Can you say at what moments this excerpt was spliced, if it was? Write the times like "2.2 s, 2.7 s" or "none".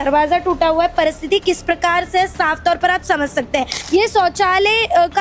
3.8 s